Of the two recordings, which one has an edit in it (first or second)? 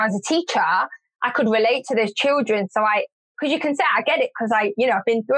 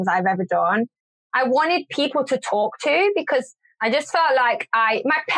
second